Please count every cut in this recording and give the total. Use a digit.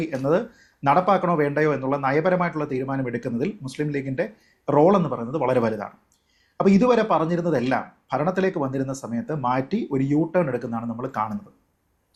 0